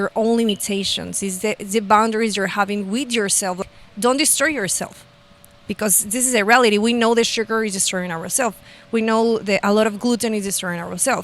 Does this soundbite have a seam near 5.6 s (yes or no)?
no